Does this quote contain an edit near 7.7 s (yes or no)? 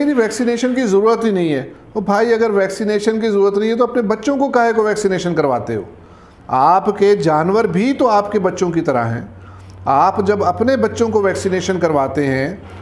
no